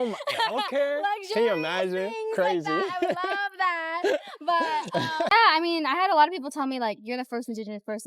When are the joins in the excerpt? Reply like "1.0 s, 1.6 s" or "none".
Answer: 5.3 s